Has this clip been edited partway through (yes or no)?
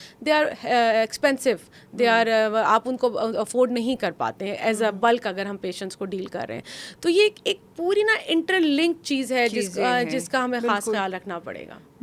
no